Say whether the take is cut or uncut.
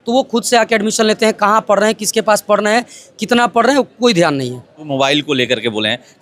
cut